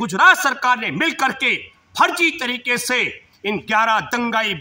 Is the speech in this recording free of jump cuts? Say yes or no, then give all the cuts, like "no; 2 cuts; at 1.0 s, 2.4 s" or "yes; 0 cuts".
yes; 0 cuts